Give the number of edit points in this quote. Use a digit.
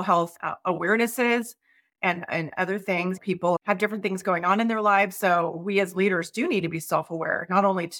1